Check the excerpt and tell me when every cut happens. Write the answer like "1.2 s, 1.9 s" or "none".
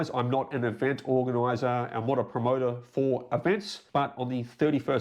3.7 s